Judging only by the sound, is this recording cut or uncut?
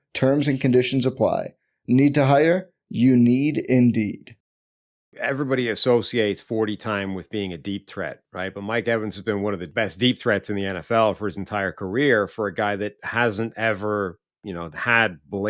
cut